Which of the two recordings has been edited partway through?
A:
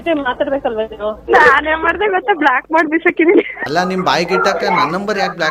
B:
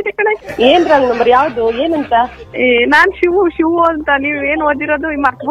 A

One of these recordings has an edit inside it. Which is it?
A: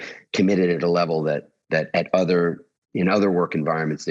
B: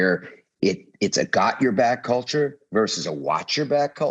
B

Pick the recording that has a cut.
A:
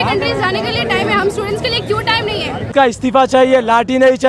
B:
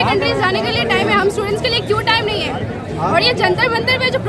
A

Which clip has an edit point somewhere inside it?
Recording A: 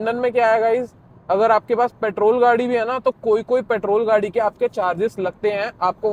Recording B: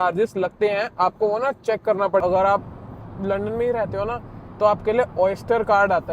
B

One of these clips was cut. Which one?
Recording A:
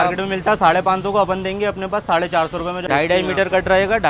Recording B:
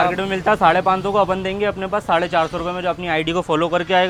A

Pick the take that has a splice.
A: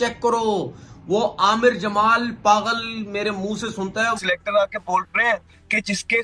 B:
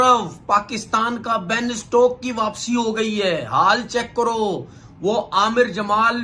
A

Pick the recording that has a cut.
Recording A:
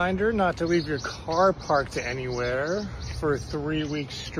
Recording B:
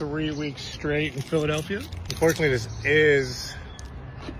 B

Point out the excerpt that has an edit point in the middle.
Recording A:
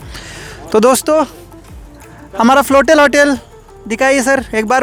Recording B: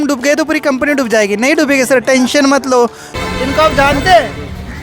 B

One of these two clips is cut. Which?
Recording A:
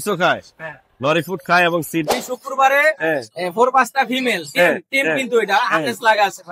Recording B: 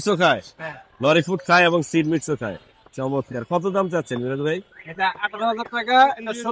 A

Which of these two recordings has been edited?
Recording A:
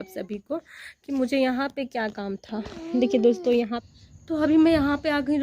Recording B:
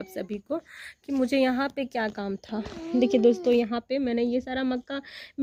A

